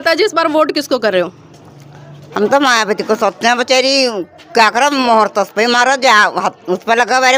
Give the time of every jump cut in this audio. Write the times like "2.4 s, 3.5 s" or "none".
none